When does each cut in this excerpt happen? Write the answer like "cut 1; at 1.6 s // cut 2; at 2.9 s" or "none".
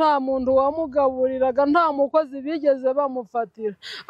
none